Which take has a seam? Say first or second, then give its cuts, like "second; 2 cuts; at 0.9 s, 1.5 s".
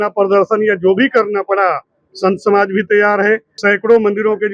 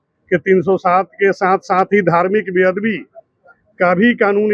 first; 1 cut; at 3.5 s